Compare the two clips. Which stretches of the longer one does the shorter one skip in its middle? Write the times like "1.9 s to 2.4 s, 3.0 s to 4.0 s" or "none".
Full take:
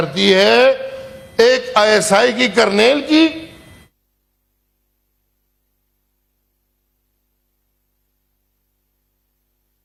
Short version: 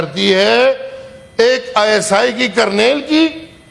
none

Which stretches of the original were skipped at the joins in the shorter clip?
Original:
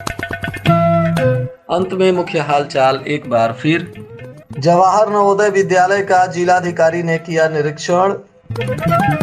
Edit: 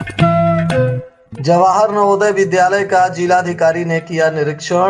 1.5 s to 4.2 s

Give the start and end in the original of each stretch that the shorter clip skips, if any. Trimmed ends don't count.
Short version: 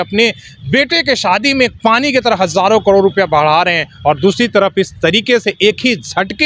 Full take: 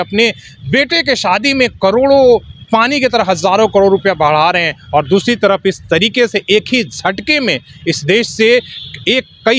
1.7 s to 2.6 s

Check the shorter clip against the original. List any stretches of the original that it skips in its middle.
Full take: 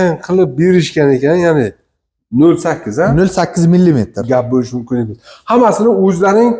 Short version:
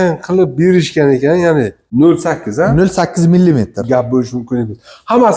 1.8 s to 2.2 s

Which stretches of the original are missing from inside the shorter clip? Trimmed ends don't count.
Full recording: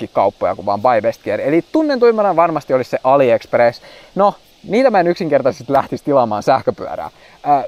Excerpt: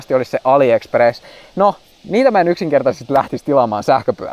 none

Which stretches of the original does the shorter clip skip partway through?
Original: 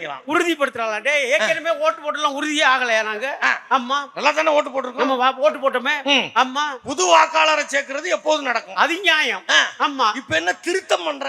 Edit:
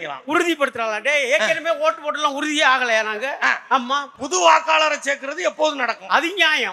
4.1 s to 6.8 s

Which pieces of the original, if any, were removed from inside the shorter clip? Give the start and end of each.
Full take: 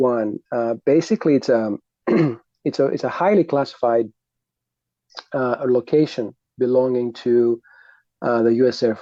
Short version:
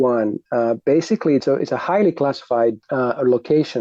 1.4 s to 2.8 s, 4.1 s to 5.3 s

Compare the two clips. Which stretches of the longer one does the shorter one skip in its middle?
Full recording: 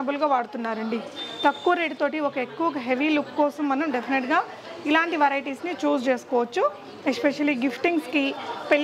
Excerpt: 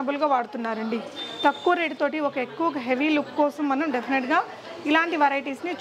none

